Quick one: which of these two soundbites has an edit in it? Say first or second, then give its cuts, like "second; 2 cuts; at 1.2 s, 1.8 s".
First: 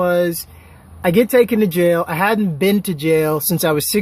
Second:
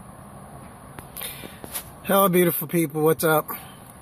first; 1 cut; at 2.5 s